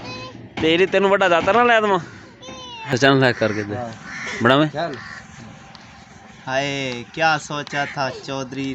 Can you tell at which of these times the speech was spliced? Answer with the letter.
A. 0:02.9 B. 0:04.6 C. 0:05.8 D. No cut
A